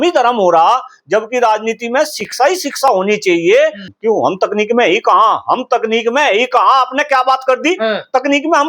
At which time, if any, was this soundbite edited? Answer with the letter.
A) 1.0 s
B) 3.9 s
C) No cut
B